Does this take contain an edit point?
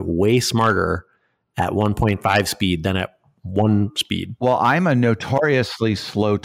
no; 0 cuts

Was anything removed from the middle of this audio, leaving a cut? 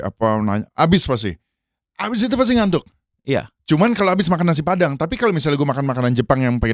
no; 0 cuts

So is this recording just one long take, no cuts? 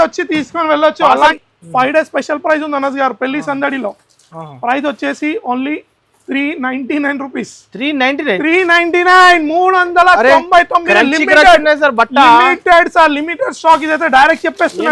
no; 1 cut; at 1.3 s

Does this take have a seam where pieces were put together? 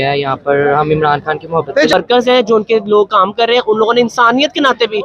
yes; 1 cut; at 1.9 s

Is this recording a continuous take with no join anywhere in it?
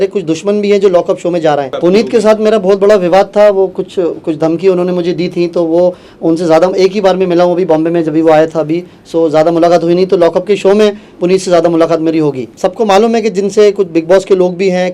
no; 2 cuts; at 1.7 s, 12.5 s

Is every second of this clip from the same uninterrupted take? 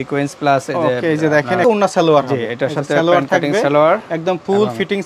no; 1 cut; at 1.6 s

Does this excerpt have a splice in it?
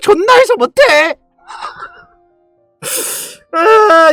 no; 0 cuts

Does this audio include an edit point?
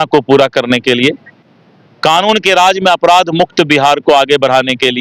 no; 0 cuts

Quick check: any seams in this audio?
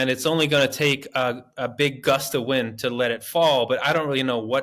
no; 0 cuts

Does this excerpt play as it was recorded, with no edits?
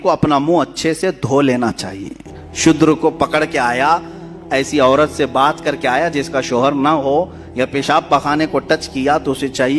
yes; 0 cuts

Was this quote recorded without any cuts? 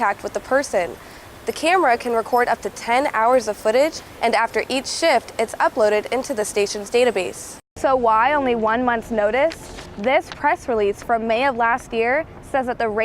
no; 1 cut; at 7.6 s

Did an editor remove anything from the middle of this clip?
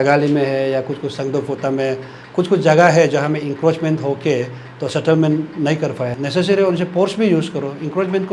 yes; 1 cut; at 6.2 s

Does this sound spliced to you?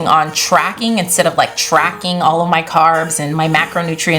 no; 0 cuts

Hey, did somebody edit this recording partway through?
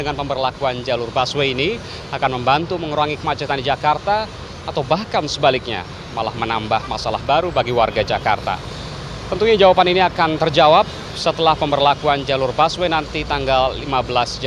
no; 0 cuts

